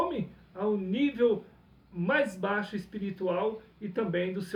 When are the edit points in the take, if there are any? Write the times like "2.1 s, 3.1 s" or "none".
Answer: none

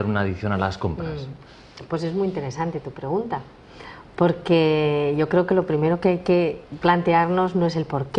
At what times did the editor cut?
2.6 s

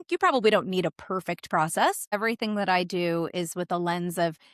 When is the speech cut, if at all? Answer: 2.2 s

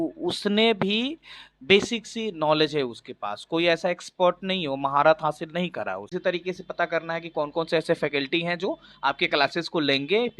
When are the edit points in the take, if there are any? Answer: 6.0 s

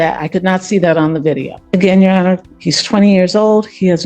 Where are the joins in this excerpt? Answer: 1.5 s

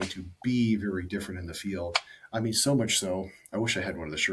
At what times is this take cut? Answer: none

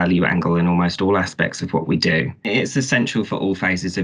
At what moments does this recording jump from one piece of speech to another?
2.5 s

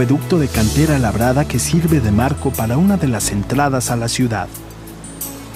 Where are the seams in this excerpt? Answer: none

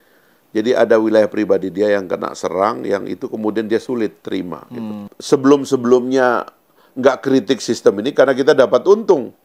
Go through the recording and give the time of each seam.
5.1 s

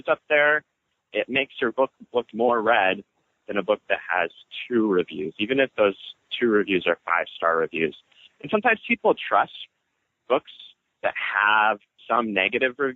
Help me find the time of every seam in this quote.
none

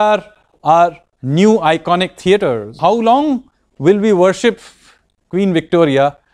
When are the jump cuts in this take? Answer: 2.8 s

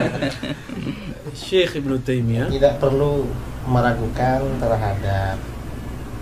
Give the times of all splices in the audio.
2.5 s

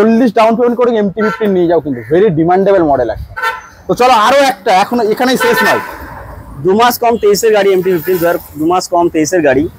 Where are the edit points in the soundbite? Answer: none

